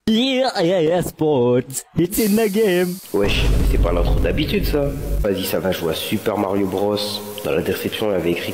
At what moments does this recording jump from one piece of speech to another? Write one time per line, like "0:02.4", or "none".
0:05.2